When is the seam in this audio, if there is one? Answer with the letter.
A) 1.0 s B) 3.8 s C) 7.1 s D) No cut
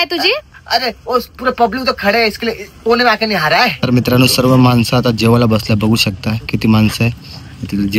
B